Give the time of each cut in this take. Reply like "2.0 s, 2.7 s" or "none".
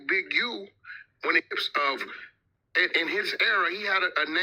1.5 s